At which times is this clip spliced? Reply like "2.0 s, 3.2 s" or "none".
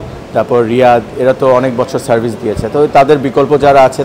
none